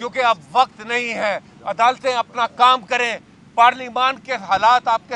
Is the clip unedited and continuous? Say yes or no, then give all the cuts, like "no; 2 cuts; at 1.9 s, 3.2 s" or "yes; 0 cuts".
yes; 0 cuts